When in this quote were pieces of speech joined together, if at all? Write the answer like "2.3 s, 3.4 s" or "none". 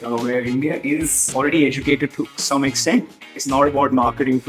1.3 s, 3.4 s